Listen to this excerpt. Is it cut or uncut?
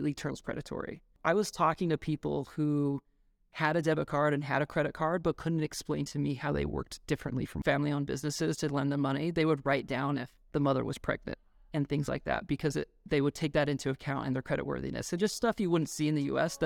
cut